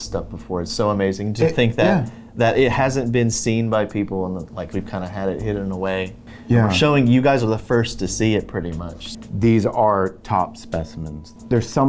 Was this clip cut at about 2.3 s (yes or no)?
no